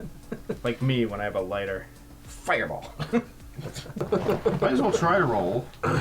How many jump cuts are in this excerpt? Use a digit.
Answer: 1